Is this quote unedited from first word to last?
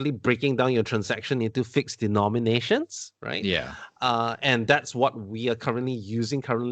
yes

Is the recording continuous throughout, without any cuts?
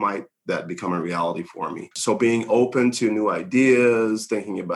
no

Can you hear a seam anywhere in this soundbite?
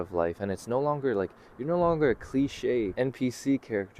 yes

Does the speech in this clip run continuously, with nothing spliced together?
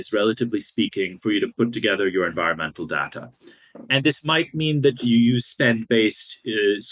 no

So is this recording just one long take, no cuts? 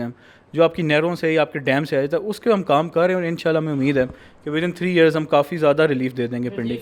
yes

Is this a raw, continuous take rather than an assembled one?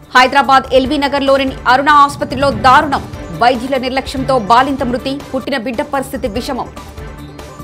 yes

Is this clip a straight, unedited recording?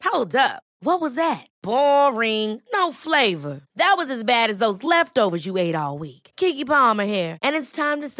yes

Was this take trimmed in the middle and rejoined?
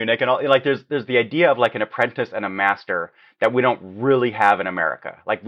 no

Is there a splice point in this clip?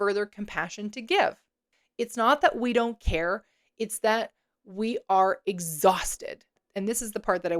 yes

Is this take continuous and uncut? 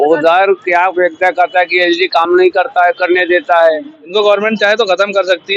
no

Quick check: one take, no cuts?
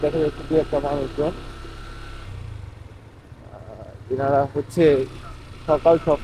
yes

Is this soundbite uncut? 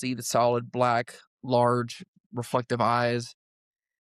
no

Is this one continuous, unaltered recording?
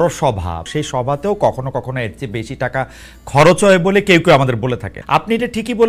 no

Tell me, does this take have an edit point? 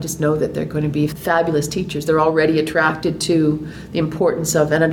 yes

